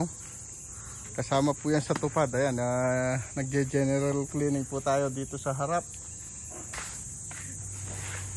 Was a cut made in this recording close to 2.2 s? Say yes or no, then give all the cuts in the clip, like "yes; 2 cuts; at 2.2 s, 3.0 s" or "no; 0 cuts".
no; 1 cut; at 6.6 s